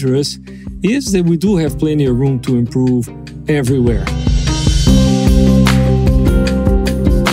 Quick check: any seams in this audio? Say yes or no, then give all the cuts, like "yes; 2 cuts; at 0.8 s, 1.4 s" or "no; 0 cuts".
yes; 1 cut; at 4.1 s